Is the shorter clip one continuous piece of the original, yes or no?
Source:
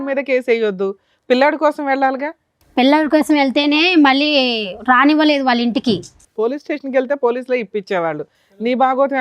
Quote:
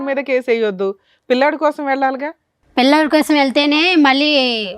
yes